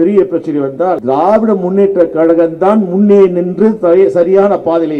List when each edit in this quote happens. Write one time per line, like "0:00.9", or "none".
0:01.0